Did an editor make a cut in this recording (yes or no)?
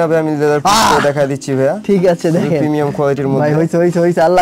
no